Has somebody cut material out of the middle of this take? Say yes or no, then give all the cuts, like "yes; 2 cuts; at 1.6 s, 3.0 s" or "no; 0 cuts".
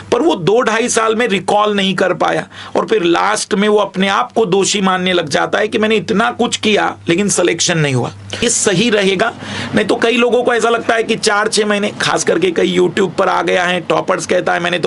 yes; 1 cut; at 8.4 s